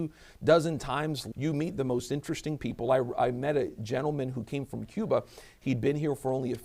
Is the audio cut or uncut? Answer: cut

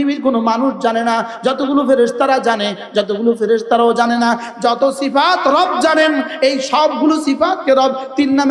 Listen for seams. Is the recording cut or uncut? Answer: uncut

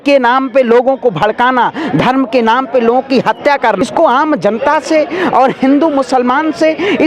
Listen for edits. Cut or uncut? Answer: cut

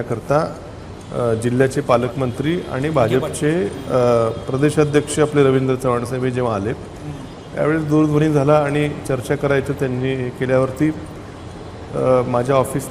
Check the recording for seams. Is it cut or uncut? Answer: uncut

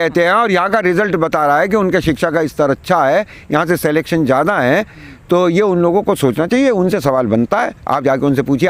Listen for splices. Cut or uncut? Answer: uncut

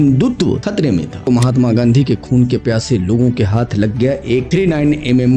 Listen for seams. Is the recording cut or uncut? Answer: cut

